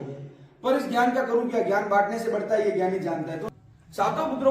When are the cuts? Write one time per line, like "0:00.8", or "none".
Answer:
0:03.4